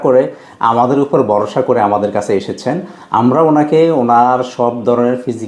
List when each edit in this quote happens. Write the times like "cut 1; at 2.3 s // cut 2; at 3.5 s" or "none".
none

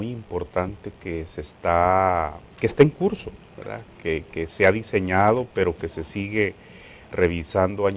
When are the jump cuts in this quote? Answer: cut 1; at 5.7 s

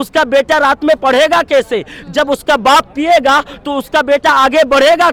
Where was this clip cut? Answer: none

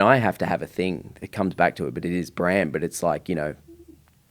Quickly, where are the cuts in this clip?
cut 1; at 1.1 s

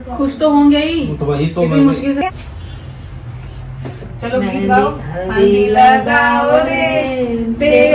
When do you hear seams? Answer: cut 1; at 2.2 s

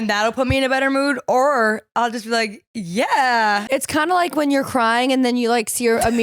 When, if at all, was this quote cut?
cut 1; at 3.7 s

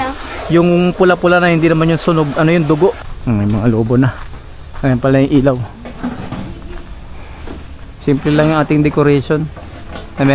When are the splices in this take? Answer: cut 1; at 3.1 s

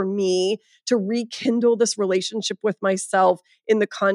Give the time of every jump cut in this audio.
none

